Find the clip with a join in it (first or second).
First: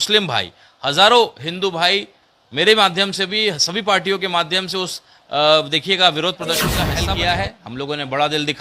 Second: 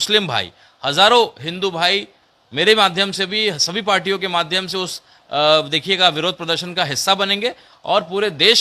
first